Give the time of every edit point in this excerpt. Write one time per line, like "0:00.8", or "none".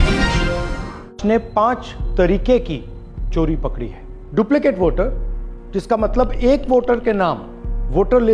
0:01.2